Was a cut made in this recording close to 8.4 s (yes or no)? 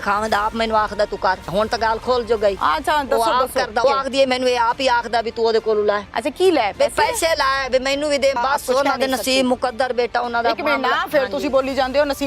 yes